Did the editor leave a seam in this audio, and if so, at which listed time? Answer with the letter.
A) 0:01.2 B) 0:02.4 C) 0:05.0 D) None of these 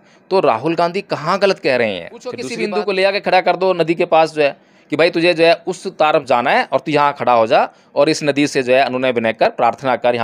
B